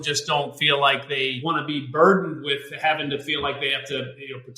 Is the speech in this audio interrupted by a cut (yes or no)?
yes